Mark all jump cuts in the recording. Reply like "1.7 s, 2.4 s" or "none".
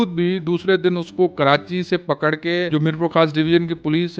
2.7 s